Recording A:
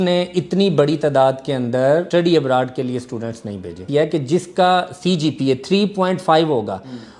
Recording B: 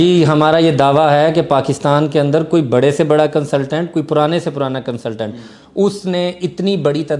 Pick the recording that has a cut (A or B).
A